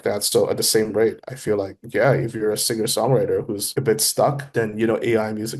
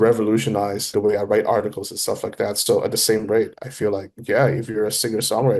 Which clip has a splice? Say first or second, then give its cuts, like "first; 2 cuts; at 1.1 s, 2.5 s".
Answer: second; 1 cut; at 0.9 s